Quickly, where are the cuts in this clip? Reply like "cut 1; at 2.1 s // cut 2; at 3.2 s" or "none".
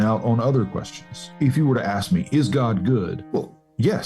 cut 1; at 1.3 s // cut 2; at 3.2 s